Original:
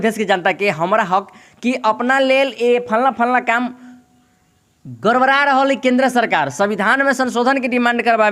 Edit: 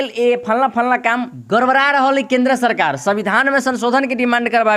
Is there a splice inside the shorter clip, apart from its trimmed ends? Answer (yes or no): yes